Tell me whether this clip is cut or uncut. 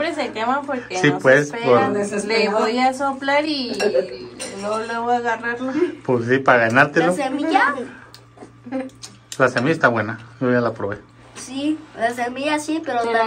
uncut